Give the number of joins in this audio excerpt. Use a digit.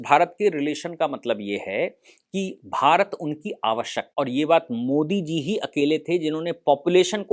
1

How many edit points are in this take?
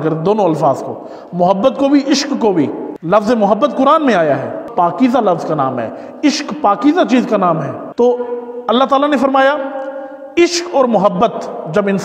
3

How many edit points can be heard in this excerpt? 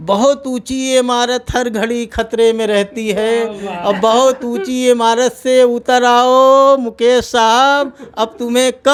0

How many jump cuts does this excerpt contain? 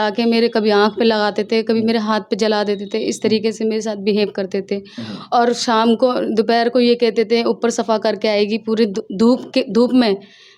0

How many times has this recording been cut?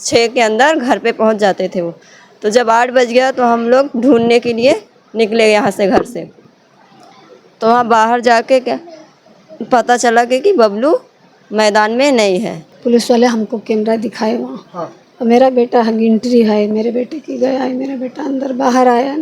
1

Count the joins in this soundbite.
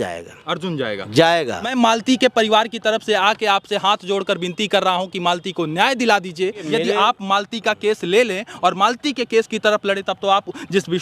2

